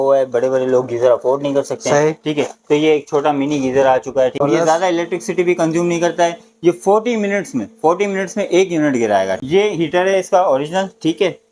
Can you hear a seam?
yes; 2 cuts; at 4.4 s, 9.3 s

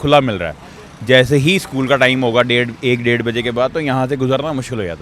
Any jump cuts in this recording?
no; 0 cuts

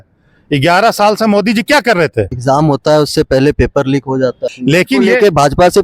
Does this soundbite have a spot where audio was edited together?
yes; 2 cuts; at 2.3 s, 4.5 s

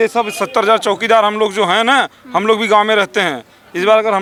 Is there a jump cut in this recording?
no; 0 cuts

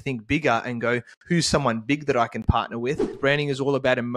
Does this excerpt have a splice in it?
yes; 1 cut; at 3.1 s

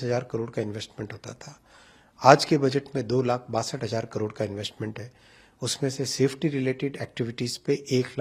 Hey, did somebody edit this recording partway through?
no; 0 cuts

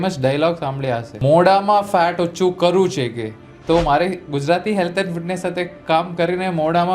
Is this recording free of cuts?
no; 1 cut; at 1.1 s

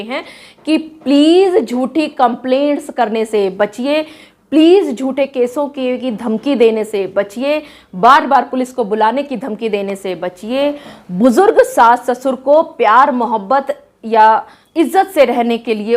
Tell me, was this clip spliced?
yes; 1 cut; at 14.6 s

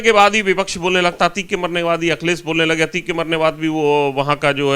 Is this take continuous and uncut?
yes; 0 cuts

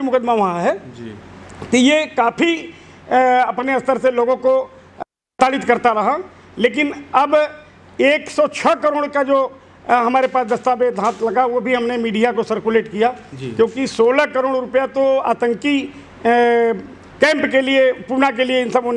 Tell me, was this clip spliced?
no; 0 cuts

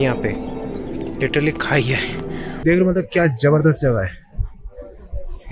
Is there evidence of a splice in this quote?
yes; 1 cut; at 2.5 s

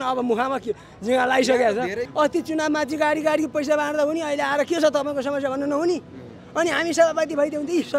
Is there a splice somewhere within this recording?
yes; 1 cut; at 2.0 s

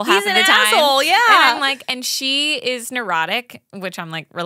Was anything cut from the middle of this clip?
no; 0 cuts

